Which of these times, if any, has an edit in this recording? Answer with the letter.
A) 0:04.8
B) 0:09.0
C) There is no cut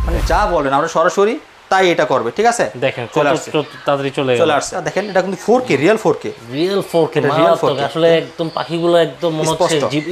A